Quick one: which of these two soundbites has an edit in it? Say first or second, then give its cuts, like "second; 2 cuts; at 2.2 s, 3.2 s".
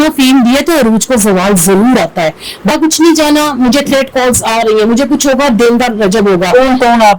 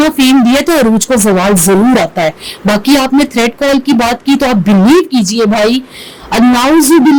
first; 1 cut; at 2.7 s